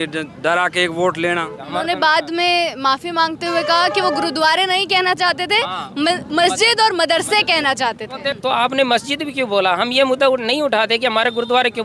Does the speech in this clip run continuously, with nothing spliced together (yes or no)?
no